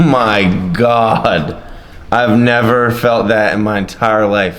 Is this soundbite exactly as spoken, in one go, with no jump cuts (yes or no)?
yes